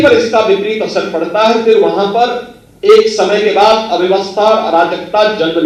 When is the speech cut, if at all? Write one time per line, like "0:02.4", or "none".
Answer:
none